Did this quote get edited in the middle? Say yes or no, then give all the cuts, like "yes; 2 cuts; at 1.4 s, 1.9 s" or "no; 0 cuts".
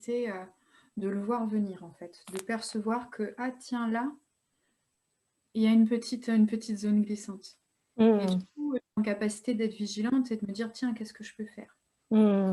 no; 0 cuts